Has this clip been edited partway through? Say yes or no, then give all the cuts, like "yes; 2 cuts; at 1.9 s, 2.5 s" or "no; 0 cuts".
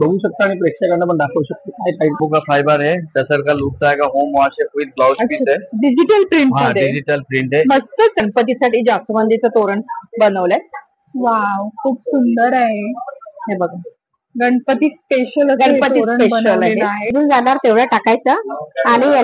yes; 3 cuts; at 2.2 s, 8.2 s, 17.1 s